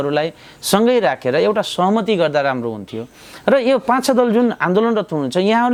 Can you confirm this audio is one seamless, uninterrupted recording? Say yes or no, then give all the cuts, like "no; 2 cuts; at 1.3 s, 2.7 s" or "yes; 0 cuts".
yes; 0 cuts